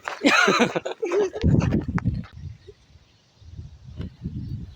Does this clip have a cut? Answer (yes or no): yes